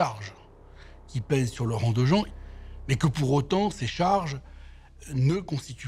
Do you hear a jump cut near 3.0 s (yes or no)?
no